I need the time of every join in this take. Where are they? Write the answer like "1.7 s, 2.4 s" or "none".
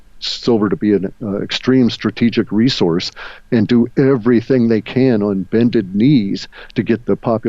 none